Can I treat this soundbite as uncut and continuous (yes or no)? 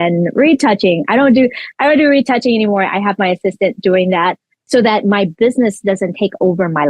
yes